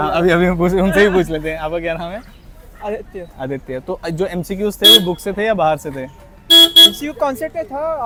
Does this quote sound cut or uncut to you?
uncut